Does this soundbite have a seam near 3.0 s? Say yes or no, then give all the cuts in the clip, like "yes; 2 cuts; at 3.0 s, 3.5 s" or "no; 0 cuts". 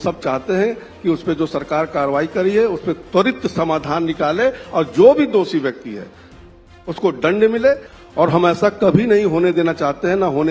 no; 1 cut; at 7.9 s